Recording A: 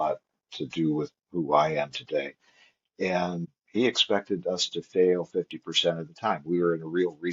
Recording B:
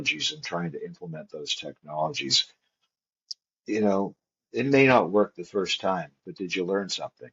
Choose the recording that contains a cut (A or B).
A